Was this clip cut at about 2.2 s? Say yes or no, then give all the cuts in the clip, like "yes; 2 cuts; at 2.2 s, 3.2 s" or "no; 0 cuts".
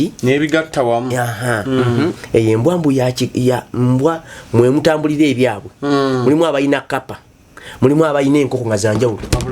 yes; 1 cut; at 2.2 s